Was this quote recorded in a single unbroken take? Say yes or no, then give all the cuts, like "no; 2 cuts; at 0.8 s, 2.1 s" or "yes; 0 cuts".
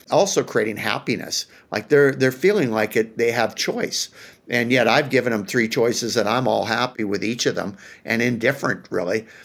yes; 0 cuts